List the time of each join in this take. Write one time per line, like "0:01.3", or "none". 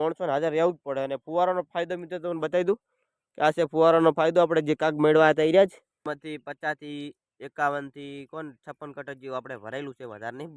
0:06.0